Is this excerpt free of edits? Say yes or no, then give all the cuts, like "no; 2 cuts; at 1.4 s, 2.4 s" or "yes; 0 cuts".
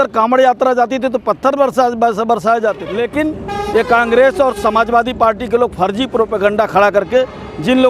no; 1 cut; at 2.9 s